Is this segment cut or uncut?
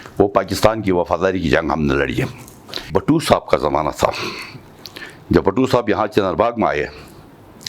cut